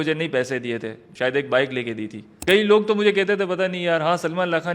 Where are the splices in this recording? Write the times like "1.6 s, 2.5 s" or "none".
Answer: 1.0 s, 2.4 s